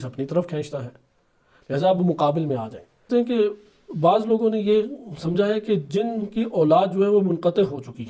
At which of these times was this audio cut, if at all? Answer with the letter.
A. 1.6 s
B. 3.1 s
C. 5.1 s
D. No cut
B